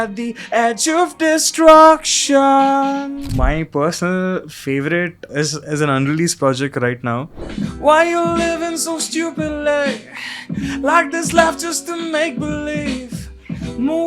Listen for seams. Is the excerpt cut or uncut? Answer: cut